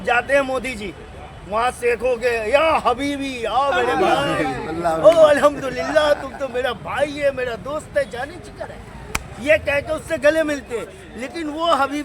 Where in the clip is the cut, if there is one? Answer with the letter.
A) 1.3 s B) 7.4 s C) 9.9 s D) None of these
D